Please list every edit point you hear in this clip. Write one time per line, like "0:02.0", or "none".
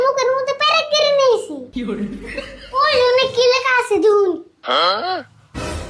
0:02.7